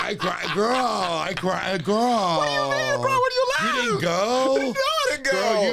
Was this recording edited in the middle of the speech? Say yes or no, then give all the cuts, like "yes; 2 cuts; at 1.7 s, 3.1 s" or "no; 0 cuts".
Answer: no; 0 cuts